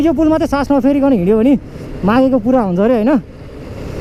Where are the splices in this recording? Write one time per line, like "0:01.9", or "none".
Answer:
none